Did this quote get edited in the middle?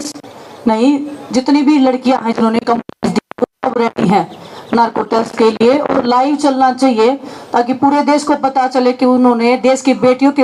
no; 0 cuts

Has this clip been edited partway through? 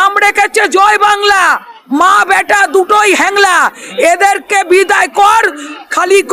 no; 0 cuts

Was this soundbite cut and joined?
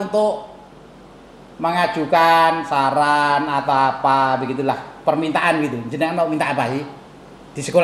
no; 0 cuts

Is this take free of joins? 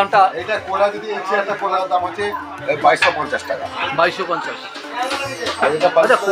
no; 1 cut; at 1.7 s

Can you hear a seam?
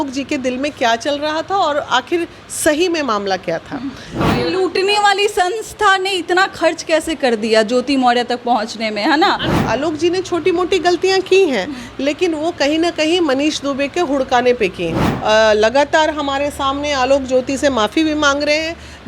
yes; 3 cuts; at 4.3 s, 9.5 s, 15.0 s

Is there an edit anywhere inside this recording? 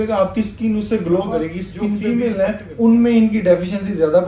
yes; 1 cut; at 2.0 s

